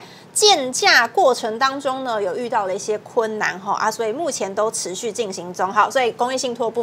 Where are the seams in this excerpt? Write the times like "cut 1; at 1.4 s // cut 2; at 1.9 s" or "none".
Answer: none